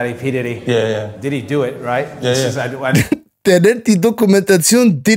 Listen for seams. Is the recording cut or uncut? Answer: uncut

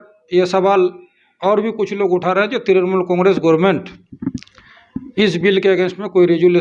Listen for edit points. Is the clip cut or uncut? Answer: uncut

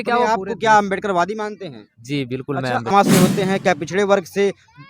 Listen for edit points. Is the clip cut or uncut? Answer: cut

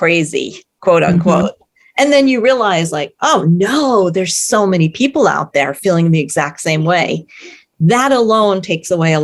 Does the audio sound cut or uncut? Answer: uncut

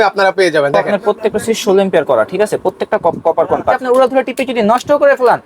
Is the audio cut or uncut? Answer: cut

